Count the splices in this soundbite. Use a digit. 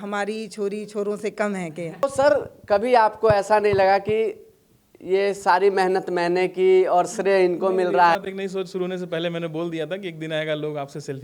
2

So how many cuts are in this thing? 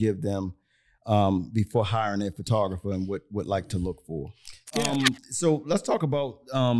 1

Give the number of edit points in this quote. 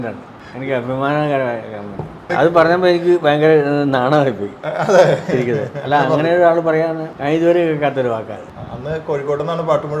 3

